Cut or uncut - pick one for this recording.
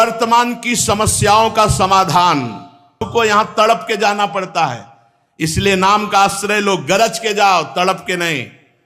cut